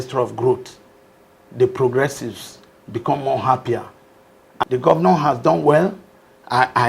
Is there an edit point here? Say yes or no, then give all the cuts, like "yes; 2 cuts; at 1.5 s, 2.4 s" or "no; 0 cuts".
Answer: yes; 1 cut; at 4.6 s